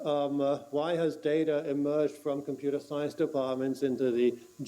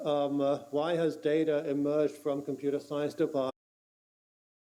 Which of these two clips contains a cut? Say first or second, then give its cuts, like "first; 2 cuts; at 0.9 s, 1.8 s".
first; 1 cut; at 3.5 s